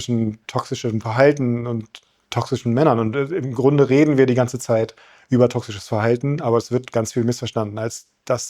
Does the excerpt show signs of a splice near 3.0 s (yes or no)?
no